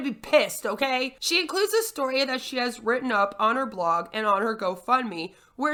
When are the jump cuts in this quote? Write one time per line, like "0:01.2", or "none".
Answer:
none